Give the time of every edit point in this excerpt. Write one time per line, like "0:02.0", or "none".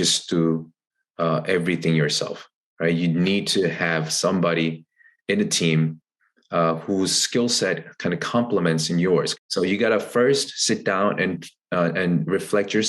0:09.3